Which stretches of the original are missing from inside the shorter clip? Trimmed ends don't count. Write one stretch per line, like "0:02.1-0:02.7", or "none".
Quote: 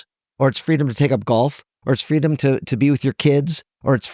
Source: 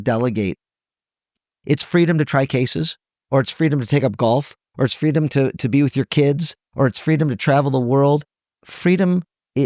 none